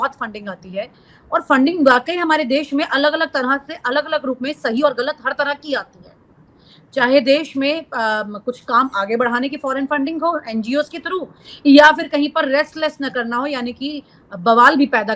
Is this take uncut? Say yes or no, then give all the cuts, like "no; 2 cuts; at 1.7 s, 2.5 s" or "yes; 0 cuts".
yes; 0 cuts